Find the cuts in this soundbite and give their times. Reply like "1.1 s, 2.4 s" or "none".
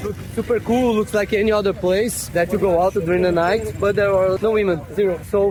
none